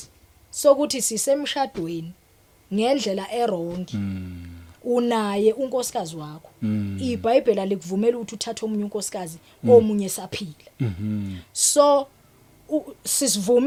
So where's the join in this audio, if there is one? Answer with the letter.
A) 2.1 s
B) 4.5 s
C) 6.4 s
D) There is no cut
D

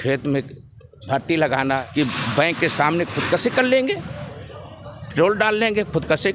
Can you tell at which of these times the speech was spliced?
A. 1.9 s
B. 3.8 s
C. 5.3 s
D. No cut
A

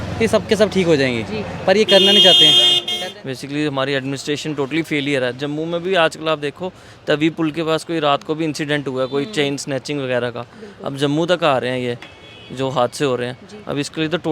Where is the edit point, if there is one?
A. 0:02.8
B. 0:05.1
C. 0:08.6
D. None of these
A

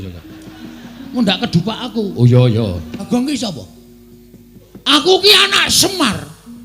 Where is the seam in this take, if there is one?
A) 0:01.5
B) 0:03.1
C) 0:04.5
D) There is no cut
B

